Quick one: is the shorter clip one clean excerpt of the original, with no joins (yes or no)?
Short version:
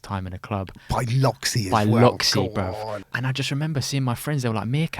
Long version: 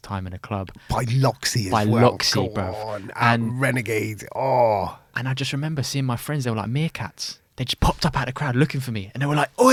no